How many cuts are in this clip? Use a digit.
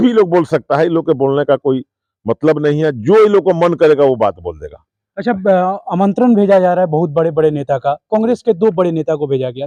0